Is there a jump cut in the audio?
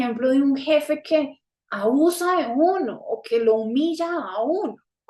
no; 0 cuts

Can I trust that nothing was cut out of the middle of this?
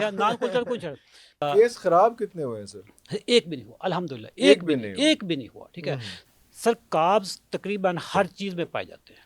no; 2 cuts; at 1.4 s, 6.1 s

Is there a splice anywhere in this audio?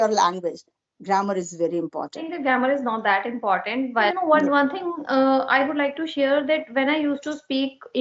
yes; 2 cuts; at 2.2 s, 4.1 s

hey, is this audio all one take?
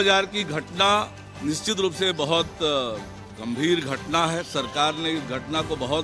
yes; 0 cuts

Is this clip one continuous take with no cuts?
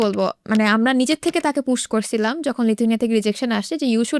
yes; 0 cuts

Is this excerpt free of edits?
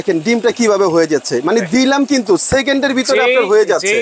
yes; 0 cuts

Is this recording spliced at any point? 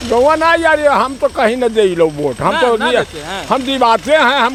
no; 0 cuts

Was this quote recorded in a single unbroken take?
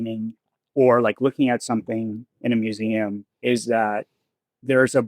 no; 1 cut; at 3.3 s

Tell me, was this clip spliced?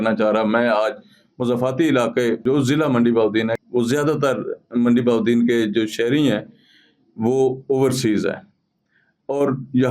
yes; 2 cuts; at 2.4 s, 3.6 s

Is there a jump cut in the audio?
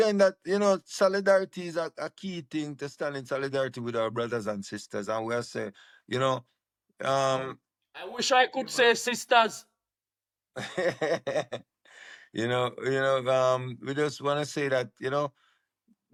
no; 0 cuts

